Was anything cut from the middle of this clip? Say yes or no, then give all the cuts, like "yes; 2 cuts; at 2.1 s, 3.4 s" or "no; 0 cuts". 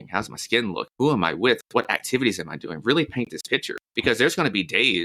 yes; 2 cuts; at 0.8 s, 3.8 s